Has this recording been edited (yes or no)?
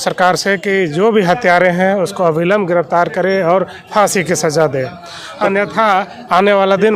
no